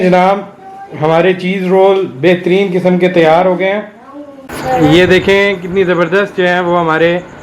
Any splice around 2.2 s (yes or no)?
no